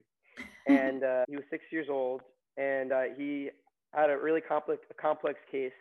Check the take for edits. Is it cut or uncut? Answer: cut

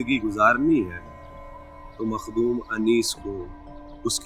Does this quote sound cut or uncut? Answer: uncut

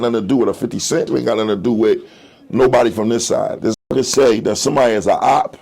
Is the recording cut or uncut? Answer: cut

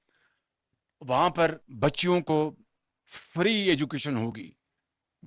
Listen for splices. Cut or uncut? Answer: uncut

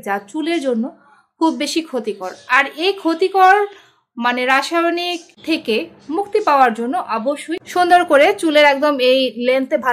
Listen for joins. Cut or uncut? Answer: cut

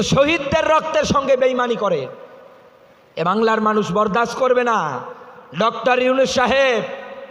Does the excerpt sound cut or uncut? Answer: uncut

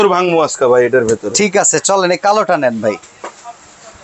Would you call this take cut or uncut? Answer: uncut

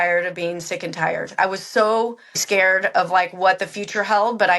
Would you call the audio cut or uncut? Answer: cut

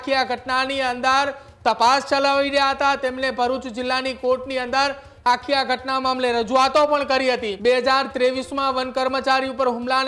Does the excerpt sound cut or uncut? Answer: cut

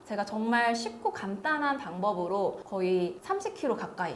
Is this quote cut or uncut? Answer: cut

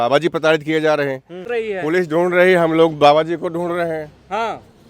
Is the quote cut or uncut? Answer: cut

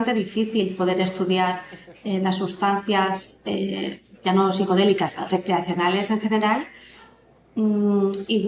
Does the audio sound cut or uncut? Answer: uncut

